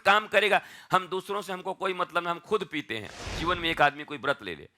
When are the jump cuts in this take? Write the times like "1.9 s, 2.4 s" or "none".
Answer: 3.0 s

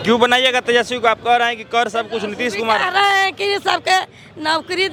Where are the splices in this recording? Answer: none

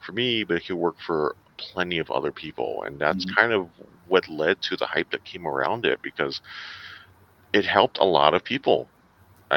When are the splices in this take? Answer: none

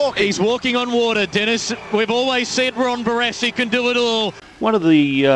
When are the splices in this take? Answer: 4.4 s

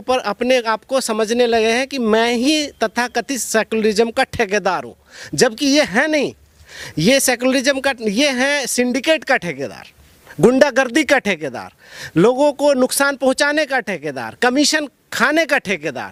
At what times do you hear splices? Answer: none

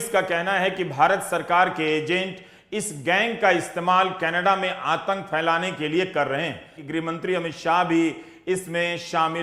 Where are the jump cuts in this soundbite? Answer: 6.8 s

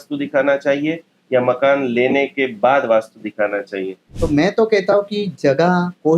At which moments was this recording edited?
4.2 s

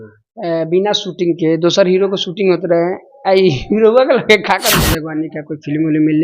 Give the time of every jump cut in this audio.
4.7 s

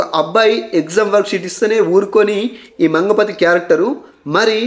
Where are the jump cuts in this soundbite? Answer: none

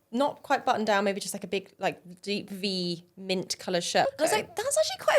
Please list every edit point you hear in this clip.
4.1 s

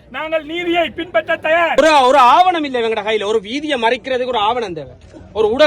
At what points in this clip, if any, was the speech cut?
1.8 s

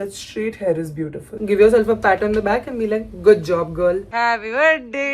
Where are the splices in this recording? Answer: 1.3 s, 4.1 s

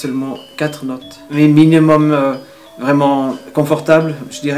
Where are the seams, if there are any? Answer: 1.1 s

